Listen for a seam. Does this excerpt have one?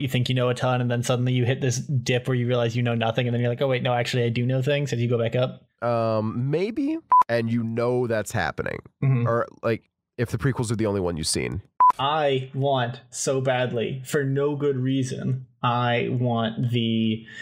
yes; 2 cuts; at 7.1 s, 11.9 s

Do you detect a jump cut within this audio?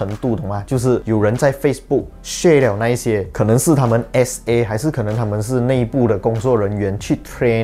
no; 0 cuts

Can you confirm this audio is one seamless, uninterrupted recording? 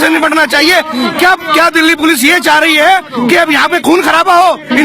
yes; 0 cuts

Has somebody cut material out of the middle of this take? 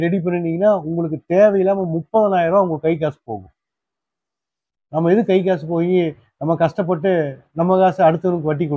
no; 0 cuts

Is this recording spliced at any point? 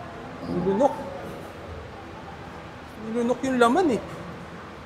yes; 1 cut; at 1.0 s

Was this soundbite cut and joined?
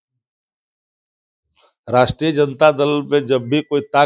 no; 0 cuts

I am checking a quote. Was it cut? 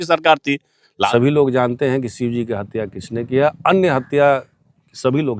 yes; 1 cut; at 1.1 s

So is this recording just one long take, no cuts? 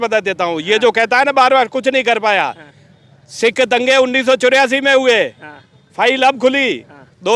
yes; 0 cuts

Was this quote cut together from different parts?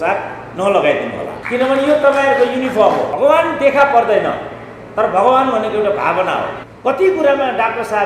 yes; 3 cuts; at 1.4 s, 3.1 s, 6.6 s

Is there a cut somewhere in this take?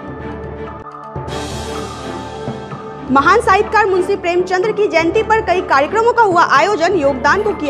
no; 0 cuts

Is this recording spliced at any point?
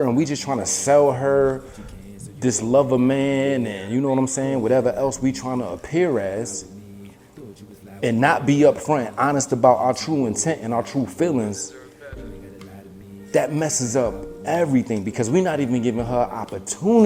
no; 0 cuts

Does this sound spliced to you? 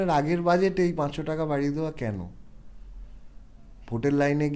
no; 0 cuts

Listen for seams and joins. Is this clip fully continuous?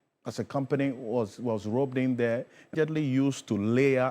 no; 1 cut; at 2.7 s

